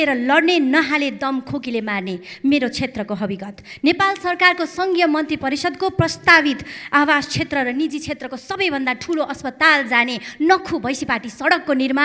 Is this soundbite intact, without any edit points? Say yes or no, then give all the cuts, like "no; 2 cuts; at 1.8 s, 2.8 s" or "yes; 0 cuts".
yes; 0 cuts